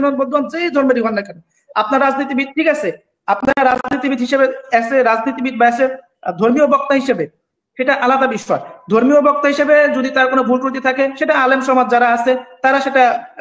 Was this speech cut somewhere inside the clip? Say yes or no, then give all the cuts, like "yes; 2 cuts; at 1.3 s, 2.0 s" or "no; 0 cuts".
no; 0 cuts